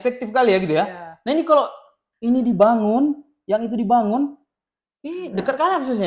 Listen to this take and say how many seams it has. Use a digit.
0